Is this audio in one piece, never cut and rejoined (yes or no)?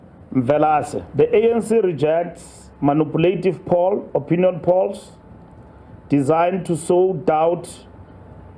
no